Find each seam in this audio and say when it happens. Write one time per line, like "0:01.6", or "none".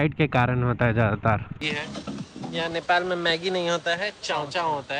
0:01.6

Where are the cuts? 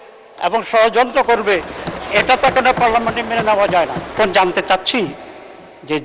0:04.1

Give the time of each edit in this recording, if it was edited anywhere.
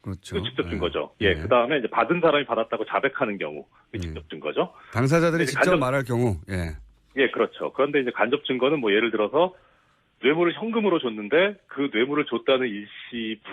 0:12.1

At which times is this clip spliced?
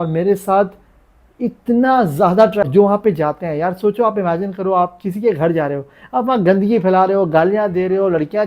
0:02.6

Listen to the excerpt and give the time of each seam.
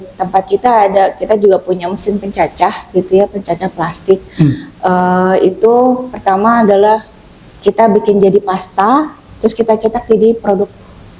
none

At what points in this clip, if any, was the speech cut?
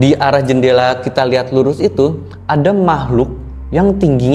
none

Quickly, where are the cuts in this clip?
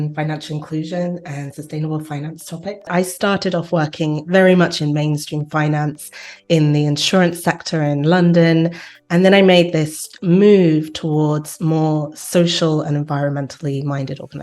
0:02.9

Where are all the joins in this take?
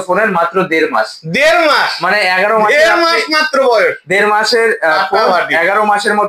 none

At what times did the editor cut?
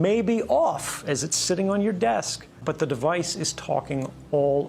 0:02.6

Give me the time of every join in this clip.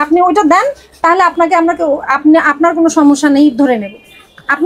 none

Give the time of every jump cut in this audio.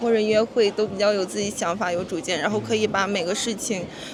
none

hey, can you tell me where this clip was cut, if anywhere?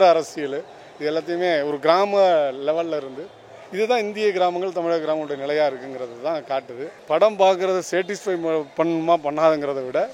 0:06.9

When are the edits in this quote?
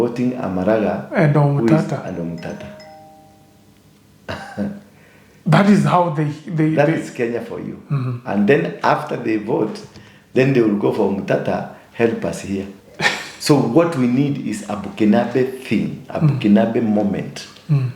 0:12.8

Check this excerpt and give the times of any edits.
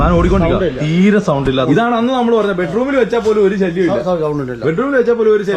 0:01.6

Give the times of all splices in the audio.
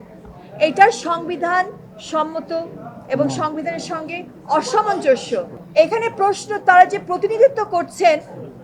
0:05.6

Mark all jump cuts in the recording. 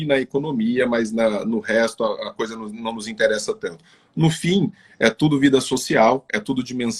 none

